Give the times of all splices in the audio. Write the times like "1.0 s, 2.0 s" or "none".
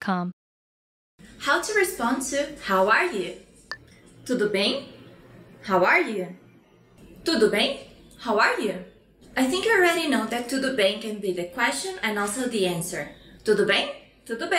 1.0 s